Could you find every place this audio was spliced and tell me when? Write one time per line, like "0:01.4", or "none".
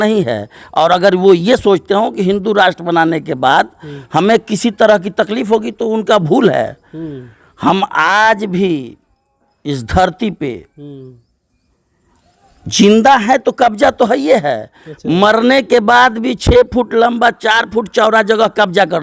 none